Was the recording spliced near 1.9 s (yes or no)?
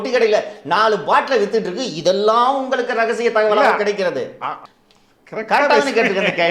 no